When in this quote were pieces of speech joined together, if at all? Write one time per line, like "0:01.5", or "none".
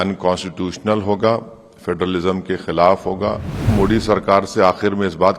0:03.7